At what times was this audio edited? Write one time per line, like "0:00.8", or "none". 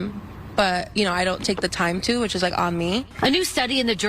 0:03.2